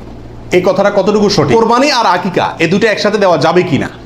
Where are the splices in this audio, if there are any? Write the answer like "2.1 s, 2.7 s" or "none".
1.5 s